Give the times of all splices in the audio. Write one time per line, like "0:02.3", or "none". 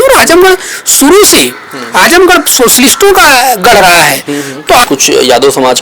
0:04.8